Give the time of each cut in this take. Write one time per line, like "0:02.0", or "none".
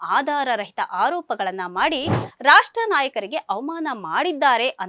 none

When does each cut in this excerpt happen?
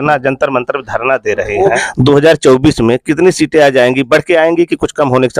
0:01.8

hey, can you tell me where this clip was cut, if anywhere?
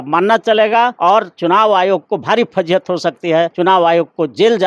0:00.9
0:03.5

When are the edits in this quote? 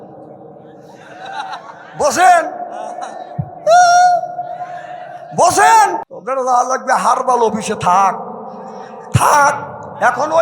0:06.1

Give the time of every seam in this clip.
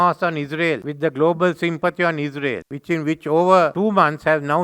0:00.9
0:02.7
0:03.7

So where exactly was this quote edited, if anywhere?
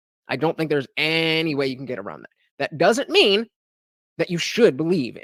none

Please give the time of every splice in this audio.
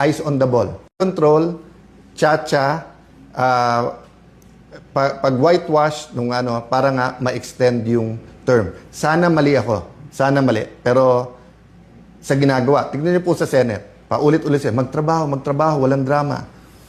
none

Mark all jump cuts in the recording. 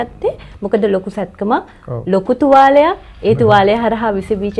none

